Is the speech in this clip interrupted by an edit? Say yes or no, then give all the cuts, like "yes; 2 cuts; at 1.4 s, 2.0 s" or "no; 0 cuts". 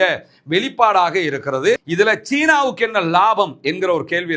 yes; 1 cut; at 1.9 s